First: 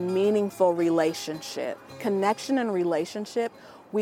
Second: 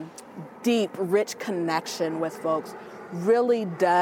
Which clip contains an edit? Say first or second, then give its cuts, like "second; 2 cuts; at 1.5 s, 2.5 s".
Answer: first; 1 cut; at 1.9 s